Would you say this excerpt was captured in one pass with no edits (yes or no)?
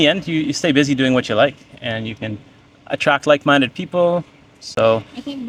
yes